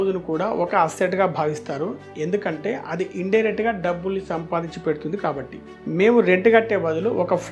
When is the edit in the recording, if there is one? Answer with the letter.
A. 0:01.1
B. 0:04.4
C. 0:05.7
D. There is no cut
D